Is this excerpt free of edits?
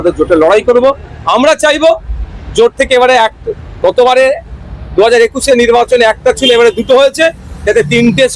yes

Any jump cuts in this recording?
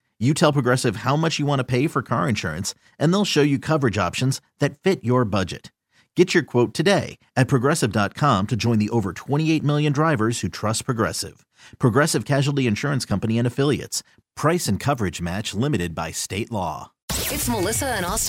yes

